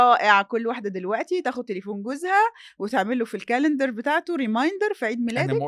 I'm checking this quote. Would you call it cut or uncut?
uncut